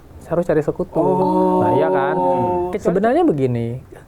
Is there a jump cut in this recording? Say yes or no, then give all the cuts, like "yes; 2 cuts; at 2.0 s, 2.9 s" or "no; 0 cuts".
yes; 1 cut; at 2.7 s